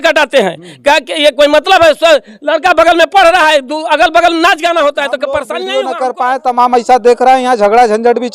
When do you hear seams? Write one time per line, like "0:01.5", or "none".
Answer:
0:05.6